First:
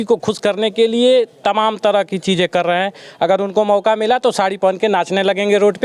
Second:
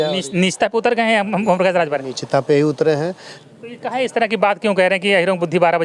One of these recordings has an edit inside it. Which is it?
second; 1 cut; at 3.3 s

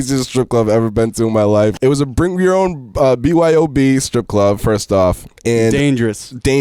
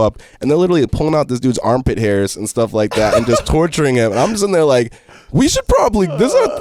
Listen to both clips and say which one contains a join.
first; 2 cuts; at 1.7 s, 5.3 s

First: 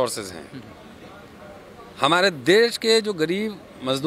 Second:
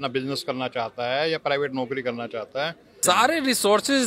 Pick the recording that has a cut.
second; 1 cut; at 2.9 s

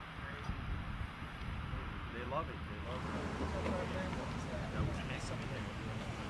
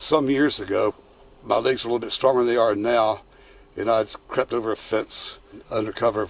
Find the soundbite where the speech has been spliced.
first; 1 cut; at 5.3 s

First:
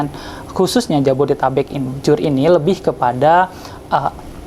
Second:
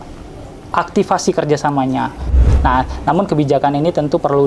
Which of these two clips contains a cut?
second; 1 cut; at 2.3 s

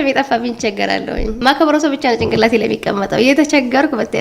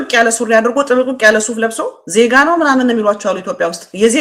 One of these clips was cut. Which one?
second; 1 cut; at 1.9 s

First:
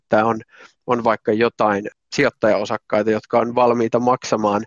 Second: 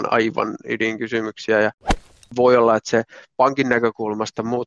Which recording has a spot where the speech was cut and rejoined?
second; 1 cut; at 2.2 s

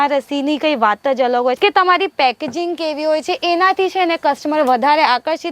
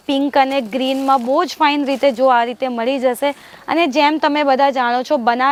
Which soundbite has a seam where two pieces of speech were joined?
first; 1 cut; at 1.6 s

